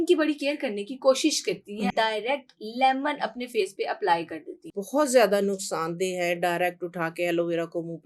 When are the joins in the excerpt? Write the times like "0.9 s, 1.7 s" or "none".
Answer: 1.9 s, 4.7 s